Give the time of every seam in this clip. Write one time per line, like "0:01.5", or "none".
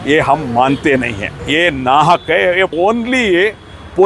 0:01.3
0:02.7